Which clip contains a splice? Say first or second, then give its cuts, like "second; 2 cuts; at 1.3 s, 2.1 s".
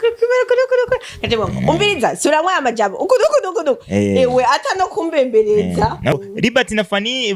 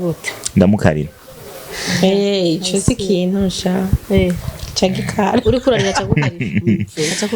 first; 1 cut; at 6.1 s